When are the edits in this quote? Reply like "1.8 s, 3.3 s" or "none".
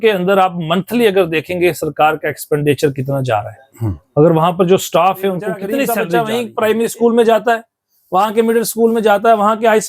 6.0 s